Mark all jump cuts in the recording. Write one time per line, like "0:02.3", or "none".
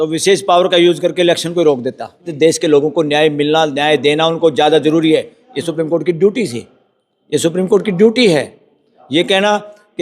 0:02.3